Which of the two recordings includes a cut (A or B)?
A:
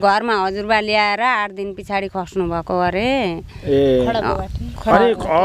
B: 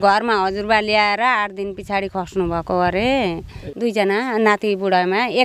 B